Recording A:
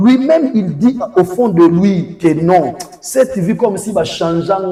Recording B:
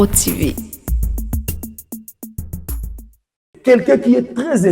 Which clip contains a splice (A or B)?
B